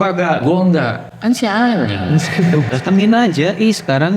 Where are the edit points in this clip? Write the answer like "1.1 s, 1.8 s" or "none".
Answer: 2.7 s